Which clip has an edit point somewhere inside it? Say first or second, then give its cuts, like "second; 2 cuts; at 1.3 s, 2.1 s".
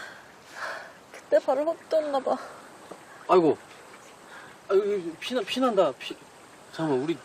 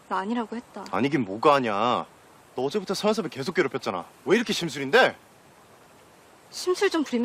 first; 1 cut; at 1.6 s